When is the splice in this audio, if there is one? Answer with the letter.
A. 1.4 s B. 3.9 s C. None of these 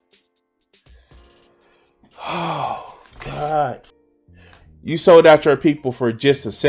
B